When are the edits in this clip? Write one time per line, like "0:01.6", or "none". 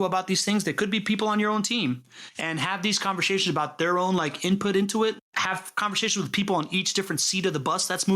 0:05.2